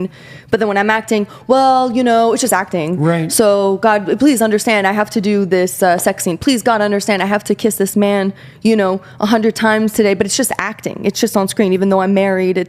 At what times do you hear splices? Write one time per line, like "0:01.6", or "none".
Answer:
none